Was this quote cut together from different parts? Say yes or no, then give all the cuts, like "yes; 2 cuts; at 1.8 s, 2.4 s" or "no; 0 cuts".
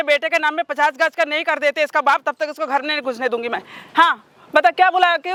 no; 0 cuts